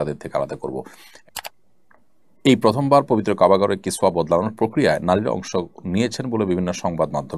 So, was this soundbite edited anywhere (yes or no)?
yes